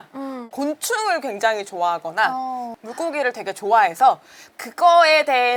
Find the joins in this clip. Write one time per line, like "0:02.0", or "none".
none